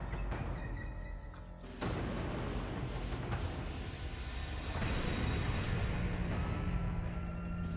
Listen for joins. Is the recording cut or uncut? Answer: uncut